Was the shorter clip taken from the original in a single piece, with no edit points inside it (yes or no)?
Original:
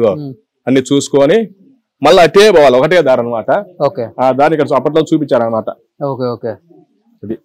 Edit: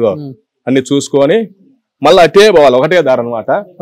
yes